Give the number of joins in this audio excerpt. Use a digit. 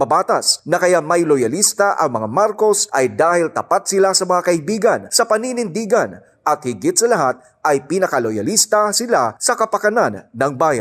0